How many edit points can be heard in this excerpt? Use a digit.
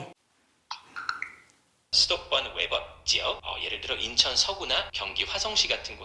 1